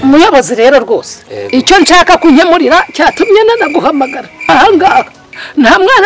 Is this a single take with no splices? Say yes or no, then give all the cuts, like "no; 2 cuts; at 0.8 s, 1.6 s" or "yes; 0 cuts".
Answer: yes; 0 cuts